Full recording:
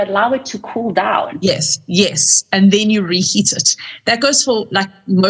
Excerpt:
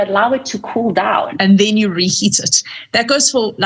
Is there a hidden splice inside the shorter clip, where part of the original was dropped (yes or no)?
yes